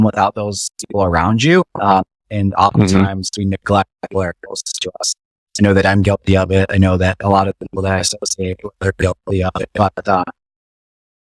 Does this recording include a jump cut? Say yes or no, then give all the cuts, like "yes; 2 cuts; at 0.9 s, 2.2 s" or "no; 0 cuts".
no; 0 cuts